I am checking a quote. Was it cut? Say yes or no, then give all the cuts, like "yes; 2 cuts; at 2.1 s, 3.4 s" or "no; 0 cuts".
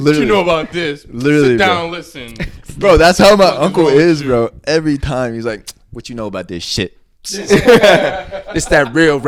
no; 0 cuts